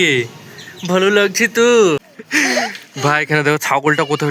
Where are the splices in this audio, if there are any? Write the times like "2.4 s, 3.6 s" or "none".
2.2 s